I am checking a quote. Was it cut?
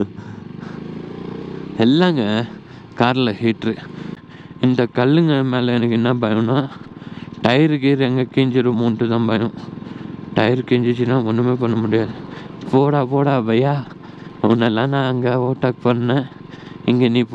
yes; 1 cut; at 3.9 s

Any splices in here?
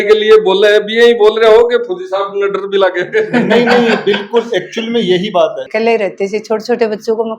yes; 1 cut; at 5.7 s

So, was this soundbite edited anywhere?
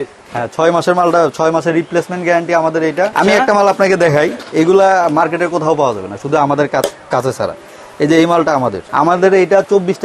yes; 2 cuts; at 3.1 s, 8.8 s

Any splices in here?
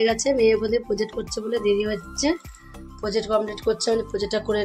no; 0 cuts

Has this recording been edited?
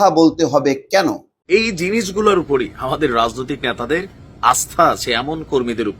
yes; 1 cut; at 1.3 s

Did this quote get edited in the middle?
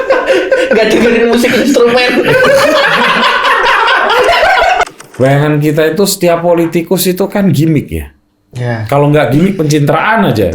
yes; 1 cut; at 4.8 s

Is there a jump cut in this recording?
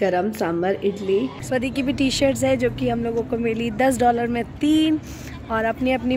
yes; 1 cut; at 1.4 s

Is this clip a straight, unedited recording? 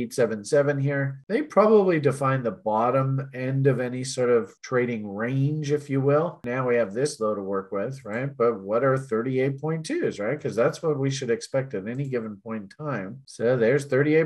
no; 1 cut; at 6.4 s

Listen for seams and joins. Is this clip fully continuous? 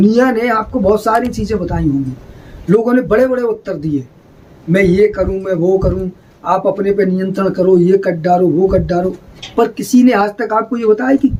yes; 0 cuts

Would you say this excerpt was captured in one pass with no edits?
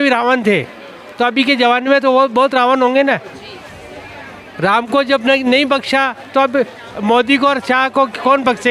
yes; 0 cuts

